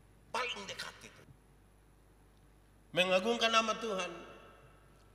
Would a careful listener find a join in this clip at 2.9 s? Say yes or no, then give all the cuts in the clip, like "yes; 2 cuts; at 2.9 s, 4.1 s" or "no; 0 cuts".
no; 1 cut; at 1.3 s